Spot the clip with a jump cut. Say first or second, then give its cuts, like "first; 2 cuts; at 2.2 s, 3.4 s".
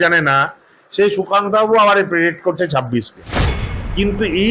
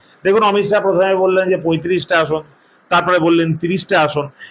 first; 1 cut; at 3.5 s